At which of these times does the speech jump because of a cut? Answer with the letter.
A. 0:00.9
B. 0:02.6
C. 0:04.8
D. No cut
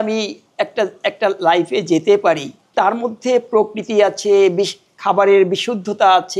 B